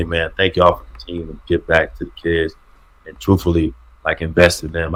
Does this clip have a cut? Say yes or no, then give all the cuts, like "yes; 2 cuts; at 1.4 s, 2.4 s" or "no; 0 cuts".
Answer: no; 0 cuts